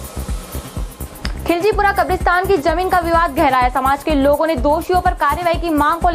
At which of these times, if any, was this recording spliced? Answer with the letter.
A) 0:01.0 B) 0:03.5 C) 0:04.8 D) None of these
A